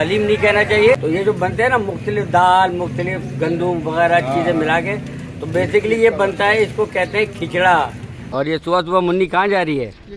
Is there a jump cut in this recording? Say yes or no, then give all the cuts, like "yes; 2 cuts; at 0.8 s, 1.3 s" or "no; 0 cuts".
yes; 2 cuts; at 1.0 s, 8.3 s